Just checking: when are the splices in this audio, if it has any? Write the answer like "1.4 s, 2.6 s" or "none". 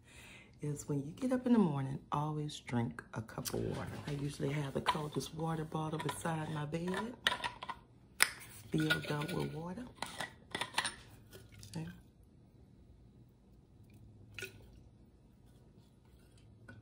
3.9 s